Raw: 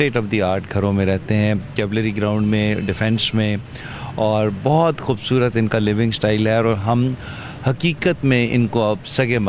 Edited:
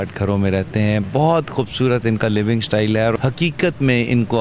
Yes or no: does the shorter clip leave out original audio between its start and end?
yes